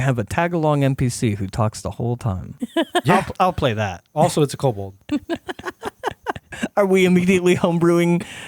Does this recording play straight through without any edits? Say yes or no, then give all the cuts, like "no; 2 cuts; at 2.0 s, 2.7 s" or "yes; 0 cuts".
no; 4 cuts; at 2.5 s, 4.0 s, 5.0 s, 6.5 s